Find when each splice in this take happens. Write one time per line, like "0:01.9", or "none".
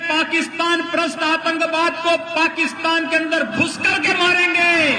none